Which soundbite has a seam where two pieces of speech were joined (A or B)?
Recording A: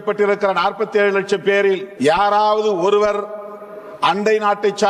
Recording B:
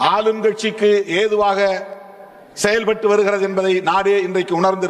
A